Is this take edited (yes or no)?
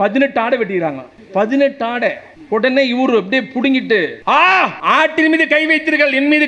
yes